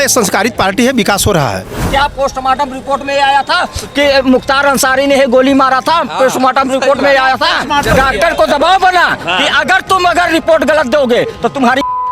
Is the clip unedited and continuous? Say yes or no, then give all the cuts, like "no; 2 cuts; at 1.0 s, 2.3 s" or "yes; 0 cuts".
no; 2 cuts; at 1.8 s, 7.9 s